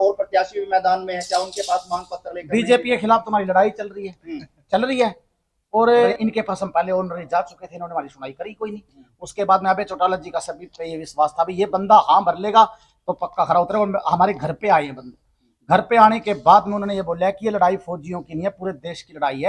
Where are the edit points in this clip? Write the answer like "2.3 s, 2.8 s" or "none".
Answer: 6.1 s